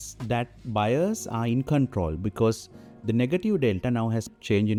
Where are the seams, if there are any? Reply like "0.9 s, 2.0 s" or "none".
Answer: none